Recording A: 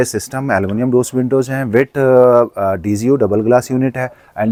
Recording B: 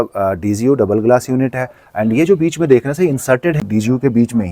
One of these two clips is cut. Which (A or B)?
B